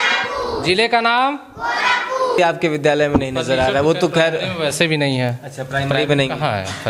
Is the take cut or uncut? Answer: cut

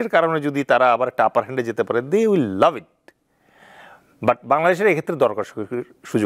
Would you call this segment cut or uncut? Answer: uncut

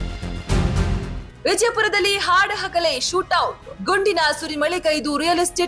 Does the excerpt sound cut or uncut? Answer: cut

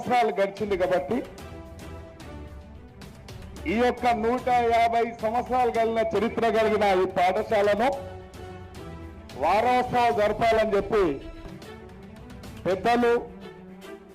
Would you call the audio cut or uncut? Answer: cut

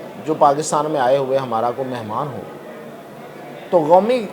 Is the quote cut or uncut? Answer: uncut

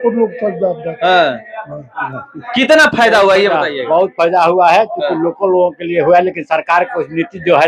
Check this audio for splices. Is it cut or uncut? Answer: uncut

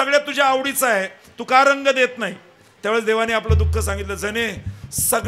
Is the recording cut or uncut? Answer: uncut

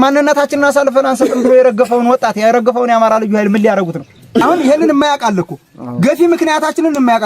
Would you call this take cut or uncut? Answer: cut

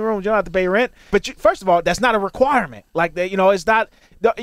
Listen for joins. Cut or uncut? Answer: cut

